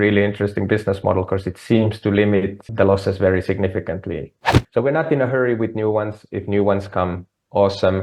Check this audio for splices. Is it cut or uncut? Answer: cut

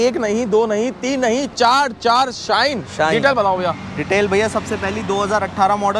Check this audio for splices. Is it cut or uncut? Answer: uncut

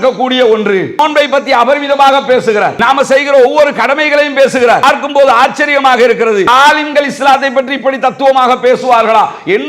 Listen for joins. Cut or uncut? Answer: cut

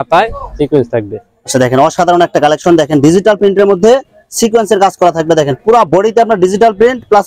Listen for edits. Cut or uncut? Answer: uncut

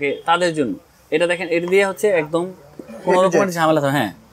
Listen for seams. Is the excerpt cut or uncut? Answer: uncut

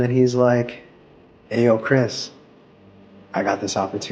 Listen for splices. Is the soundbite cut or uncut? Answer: uncut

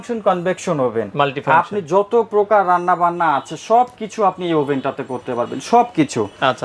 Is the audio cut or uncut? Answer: uncut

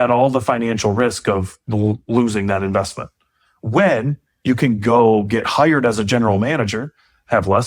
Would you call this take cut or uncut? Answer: uncut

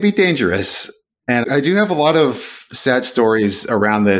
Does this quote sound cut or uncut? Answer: cut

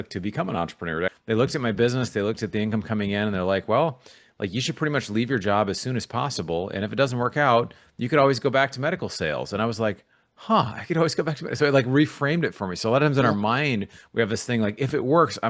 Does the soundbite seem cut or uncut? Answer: cut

